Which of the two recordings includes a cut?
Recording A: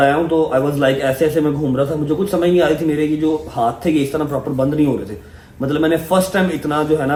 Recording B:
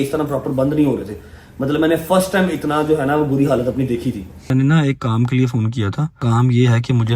B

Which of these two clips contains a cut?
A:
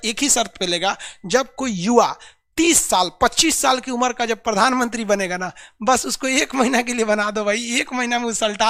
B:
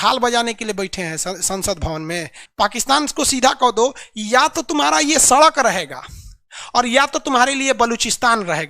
B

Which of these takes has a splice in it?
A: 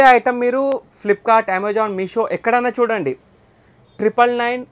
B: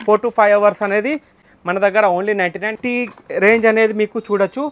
B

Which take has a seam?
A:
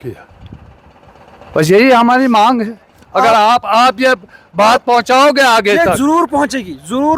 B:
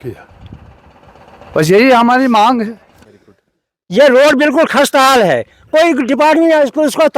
B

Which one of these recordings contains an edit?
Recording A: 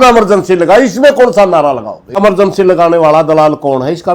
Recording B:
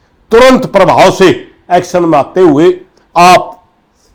A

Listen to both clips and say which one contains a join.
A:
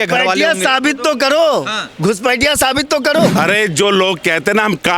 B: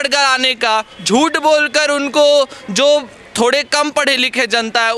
A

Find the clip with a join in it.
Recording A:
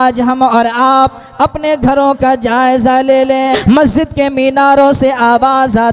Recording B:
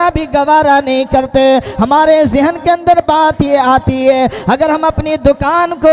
A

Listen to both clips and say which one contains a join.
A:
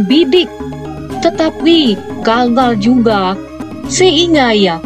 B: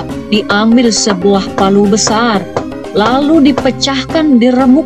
A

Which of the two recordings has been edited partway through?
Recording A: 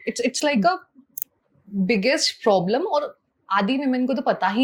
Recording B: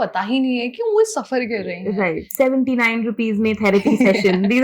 B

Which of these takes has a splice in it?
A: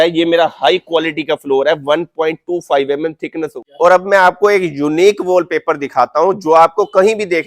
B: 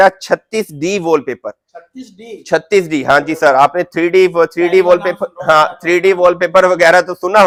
A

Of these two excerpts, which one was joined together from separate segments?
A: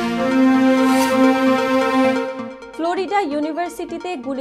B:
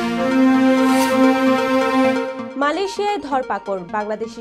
B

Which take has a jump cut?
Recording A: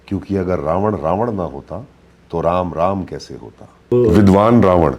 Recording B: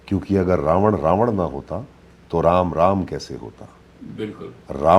A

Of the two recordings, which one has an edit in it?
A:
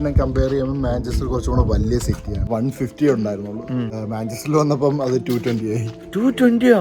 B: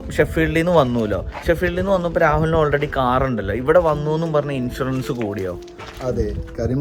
A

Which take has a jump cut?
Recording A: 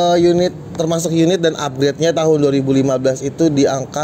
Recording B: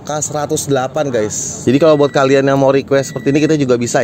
B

